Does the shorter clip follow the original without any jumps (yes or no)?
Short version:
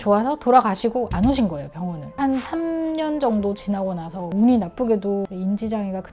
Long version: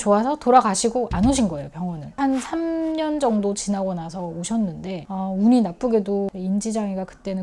no